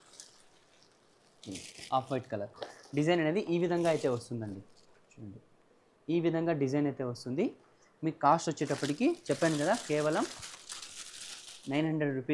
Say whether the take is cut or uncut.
uncut